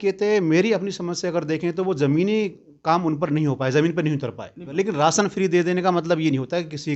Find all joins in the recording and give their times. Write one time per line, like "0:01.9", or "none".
0:04.7